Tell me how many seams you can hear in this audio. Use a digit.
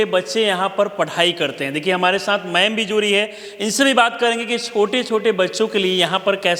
0